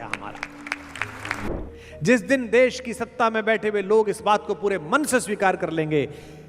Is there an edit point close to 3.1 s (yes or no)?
no